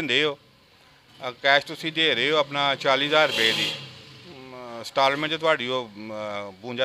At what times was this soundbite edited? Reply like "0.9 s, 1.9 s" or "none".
none

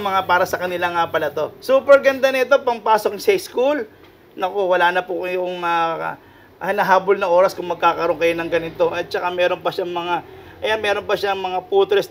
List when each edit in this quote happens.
none

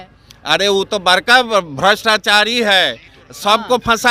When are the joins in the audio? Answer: none

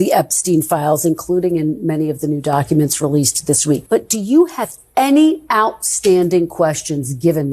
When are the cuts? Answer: 3.8 s

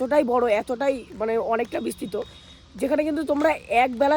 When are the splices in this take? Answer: none

